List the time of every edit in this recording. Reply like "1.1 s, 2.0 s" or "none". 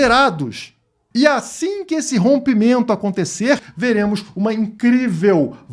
3.7 s